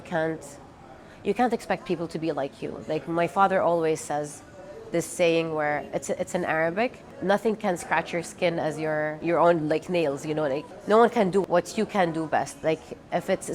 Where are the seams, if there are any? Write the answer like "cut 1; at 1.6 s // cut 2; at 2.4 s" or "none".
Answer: cut 1; at 7.1 s // cut 2; at 9.2 s // cut 3; at 10.7 s // cut 4; at 11.4 s